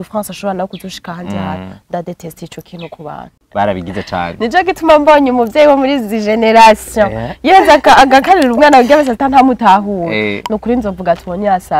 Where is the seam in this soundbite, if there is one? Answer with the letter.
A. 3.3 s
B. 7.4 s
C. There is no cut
A